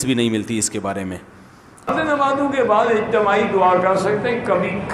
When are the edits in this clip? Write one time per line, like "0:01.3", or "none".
0:01.9